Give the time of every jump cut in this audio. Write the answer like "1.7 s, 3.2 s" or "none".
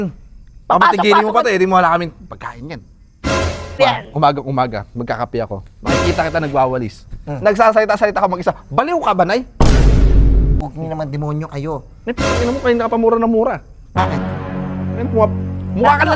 3.8 s, 10.6 s